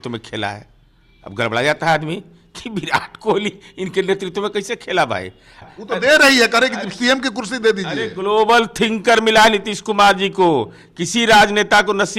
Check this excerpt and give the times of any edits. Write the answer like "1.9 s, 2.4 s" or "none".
5.7 s